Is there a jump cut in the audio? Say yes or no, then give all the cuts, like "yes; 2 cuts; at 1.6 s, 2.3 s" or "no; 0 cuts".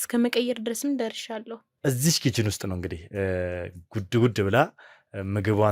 yes; 1 cut; at 1.6 s